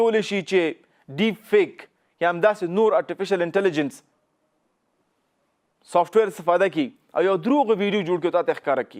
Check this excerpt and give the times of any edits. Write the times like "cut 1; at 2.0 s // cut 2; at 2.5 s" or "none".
none